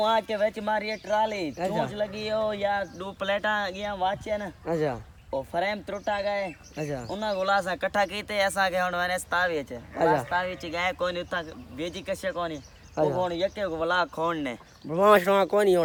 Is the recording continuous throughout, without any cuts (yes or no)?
yes